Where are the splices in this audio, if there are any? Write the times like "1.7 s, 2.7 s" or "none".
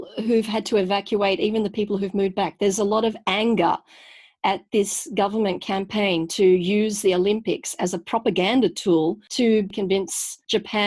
9.7 s